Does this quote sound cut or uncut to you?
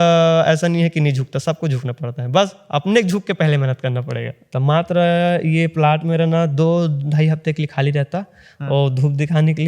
cut